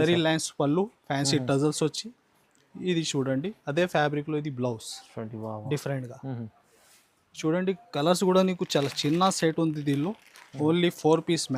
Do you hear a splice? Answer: no; 0 cuts

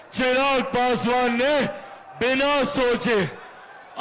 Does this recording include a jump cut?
no; 0 cuts

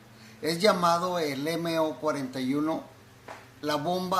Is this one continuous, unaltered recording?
no; 1 cut; at 3.0 s

